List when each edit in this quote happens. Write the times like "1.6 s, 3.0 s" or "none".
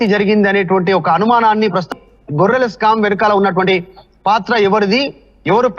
1.9 s